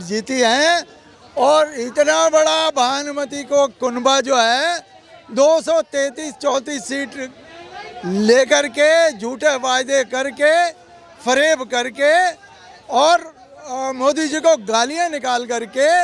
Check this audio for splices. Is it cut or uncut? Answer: uncut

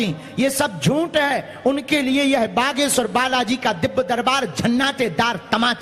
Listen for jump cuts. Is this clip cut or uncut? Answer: uncut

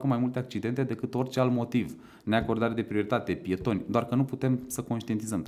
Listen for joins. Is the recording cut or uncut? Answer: uncut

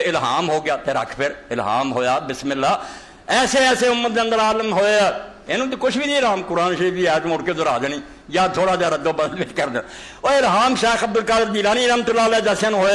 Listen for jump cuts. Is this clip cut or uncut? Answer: uncut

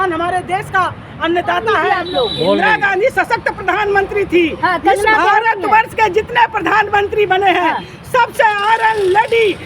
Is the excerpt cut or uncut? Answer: cut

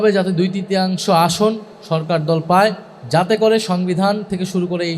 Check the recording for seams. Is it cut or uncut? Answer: cut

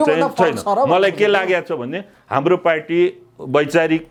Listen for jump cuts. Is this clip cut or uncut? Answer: uncut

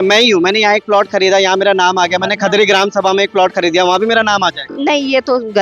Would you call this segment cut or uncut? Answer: cut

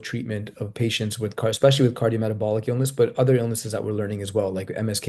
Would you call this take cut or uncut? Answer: uncut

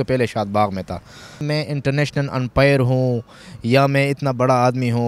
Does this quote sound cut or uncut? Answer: cut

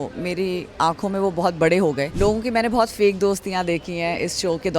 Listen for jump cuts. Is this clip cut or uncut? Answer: cut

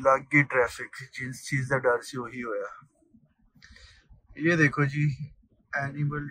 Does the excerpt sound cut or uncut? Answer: uncut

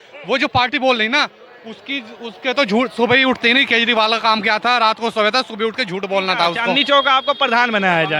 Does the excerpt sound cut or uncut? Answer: cut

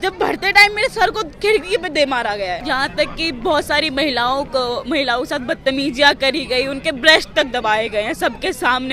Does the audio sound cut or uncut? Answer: cut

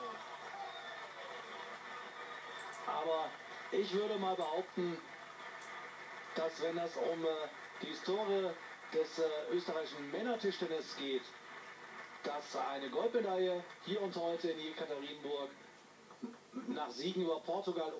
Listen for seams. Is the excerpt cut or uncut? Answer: cut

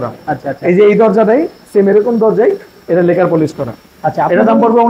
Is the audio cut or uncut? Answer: uncut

